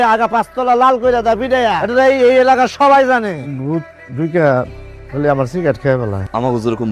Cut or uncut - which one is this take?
cut